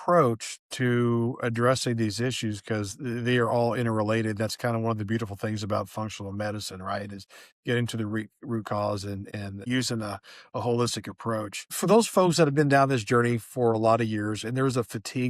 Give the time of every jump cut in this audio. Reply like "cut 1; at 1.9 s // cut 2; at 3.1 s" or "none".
cut 1; at 9.6 s // cut 2; at 11.6 s